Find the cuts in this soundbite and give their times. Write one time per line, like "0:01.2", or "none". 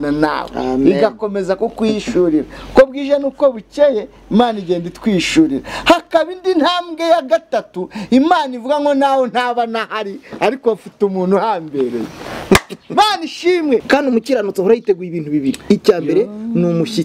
0:13.8